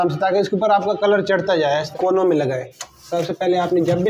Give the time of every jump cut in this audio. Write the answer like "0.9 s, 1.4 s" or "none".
1.9 s

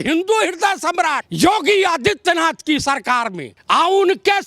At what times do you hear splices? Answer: 1.2 s, 3.5 s

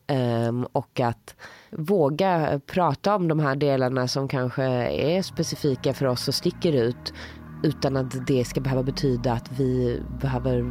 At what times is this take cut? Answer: none

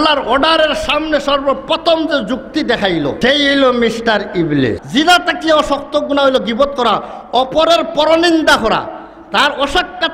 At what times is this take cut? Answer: 3.2 s, 4.8 s

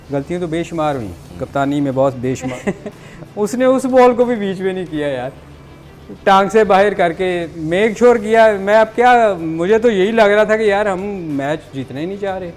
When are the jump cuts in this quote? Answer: 2.5 s

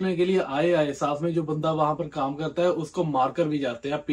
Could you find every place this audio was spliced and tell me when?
none

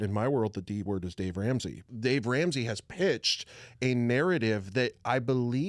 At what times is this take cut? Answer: 1.8 s

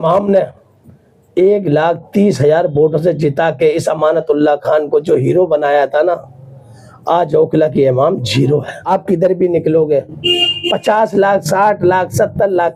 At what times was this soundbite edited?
none

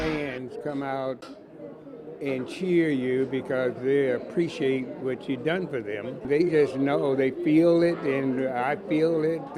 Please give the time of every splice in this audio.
6.2 s

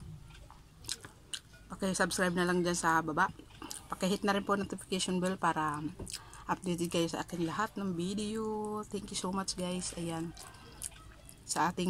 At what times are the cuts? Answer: none

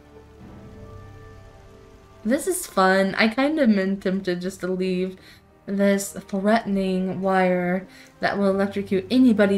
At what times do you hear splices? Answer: none

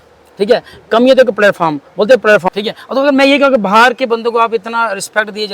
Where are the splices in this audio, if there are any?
2.5 s

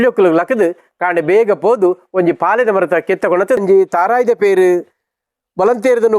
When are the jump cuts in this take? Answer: 3.6 s

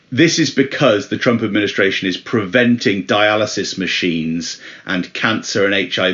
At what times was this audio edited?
none

